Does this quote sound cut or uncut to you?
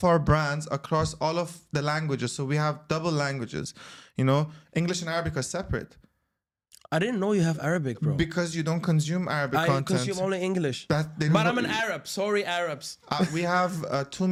uncut